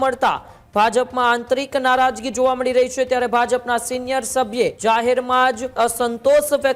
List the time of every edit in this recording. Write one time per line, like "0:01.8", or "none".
0:04.8
0:05.7